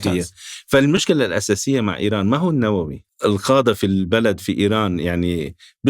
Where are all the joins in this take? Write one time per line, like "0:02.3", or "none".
0:01.0
0:03.0